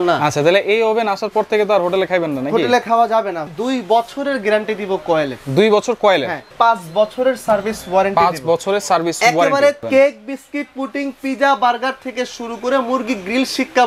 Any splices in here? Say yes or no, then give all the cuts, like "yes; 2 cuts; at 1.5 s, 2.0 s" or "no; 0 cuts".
yes; 3 cuts; at 3.4 s, 6.5 s, 9.8 s